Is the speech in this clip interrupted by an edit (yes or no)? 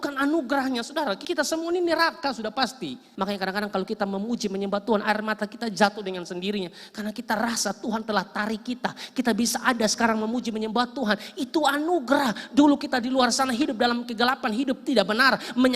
yes